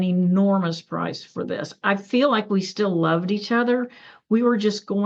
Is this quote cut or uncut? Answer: uncut